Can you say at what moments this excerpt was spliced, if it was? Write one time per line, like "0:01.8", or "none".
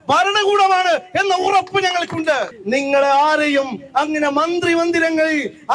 0:02.5